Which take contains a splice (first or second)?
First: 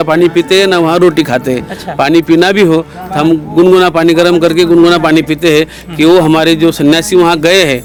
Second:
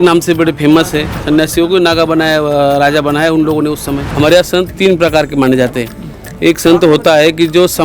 second